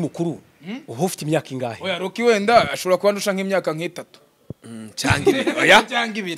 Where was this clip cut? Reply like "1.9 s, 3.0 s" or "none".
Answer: none